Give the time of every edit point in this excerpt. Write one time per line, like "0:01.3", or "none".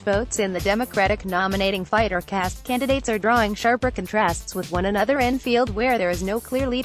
none